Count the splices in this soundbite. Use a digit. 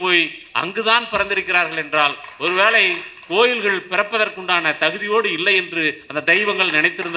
0